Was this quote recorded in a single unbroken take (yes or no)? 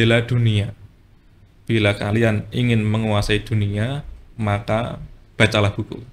yes